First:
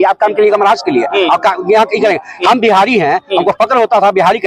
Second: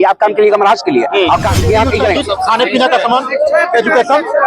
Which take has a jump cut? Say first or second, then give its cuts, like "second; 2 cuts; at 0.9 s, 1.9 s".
second; 1 cut; at 2.2 s